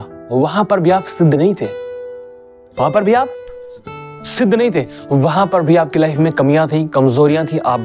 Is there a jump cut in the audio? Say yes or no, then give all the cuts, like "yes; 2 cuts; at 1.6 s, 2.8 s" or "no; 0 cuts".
no; 0 cuts